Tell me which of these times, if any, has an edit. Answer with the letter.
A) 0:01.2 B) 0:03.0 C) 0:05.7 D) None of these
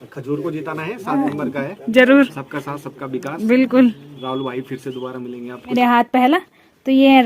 C